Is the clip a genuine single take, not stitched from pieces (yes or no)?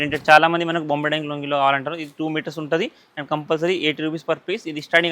yes